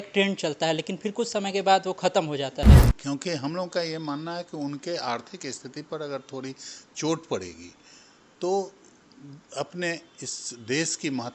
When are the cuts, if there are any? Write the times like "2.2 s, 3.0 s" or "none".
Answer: 2.9 s